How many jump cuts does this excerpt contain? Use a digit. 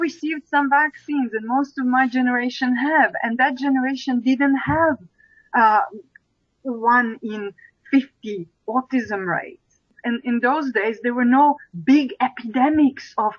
1